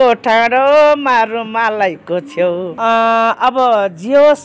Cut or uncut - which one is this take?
cut